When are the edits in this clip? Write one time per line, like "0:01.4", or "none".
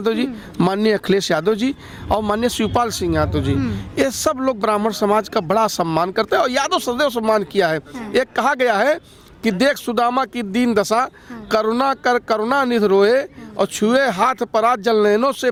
none